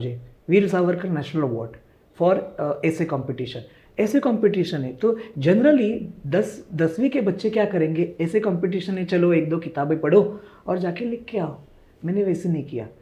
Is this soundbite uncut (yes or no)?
yes